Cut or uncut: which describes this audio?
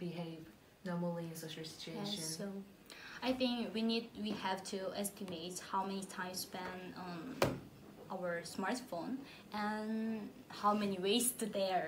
uncut